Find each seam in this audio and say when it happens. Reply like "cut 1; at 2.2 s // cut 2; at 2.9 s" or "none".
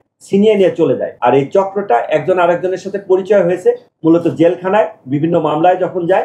cut 1; at 1.1 s

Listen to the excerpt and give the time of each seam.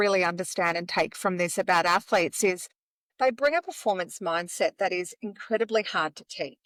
none

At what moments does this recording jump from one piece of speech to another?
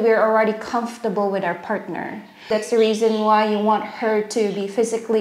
cut 1; at 2.5 s

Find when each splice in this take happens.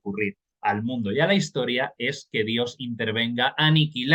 none

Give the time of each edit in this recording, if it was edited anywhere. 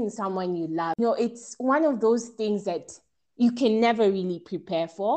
cut 1; at 1.0 s

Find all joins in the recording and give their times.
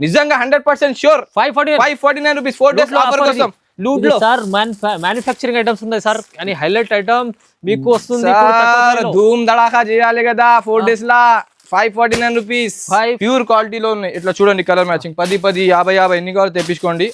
cut 1; at 13.2 s

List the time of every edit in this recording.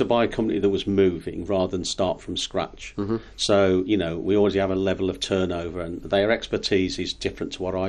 none

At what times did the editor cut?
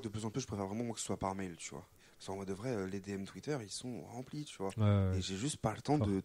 cut 1; at 2.0 s

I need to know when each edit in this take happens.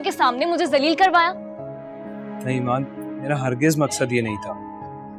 none

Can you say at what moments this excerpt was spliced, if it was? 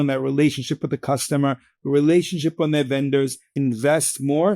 cut 1; at 3.5 s

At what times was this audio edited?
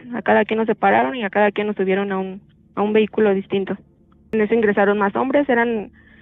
cut 1; at 4.1 s

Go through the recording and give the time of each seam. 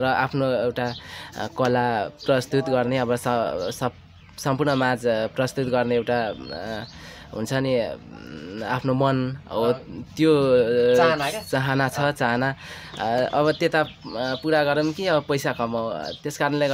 none

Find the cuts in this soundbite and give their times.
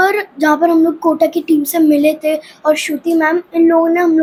none

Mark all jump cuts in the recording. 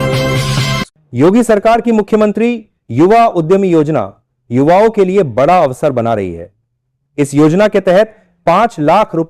cut 1; at 1.0 s

